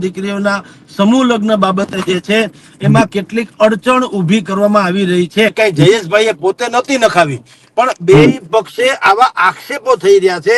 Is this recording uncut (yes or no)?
no